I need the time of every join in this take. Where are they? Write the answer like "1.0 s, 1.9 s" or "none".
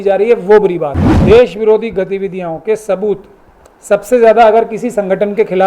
1.1 s

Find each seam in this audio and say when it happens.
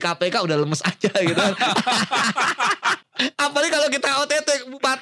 3.0 s

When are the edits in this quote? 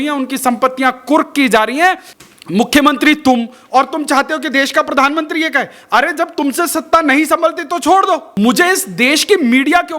2.1 s, 8.3 s

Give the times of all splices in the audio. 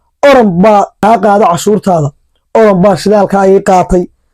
1.0 s

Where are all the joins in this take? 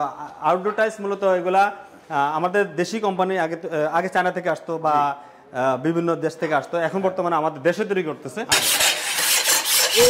8.5 s

